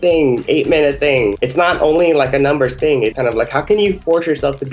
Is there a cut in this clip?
yes; 2 cuts; at 1.4 s, 3.1 s

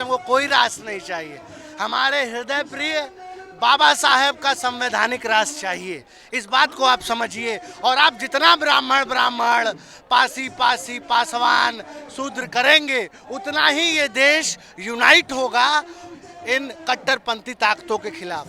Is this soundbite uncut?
yes; 0 cuts

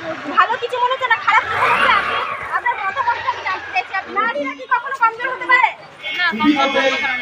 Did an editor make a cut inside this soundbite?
yes; 1 cut; at 4.1 s

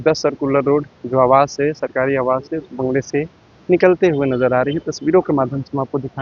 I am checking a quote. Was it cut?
no; 0 cuts

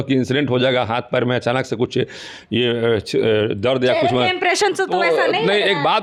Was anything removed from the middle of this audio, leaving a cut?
no; 0 cuts

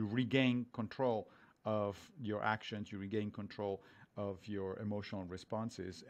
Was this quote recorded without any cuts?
yes; 0 cuts

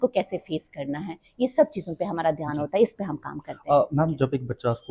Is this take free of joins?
yes; 0 cuts

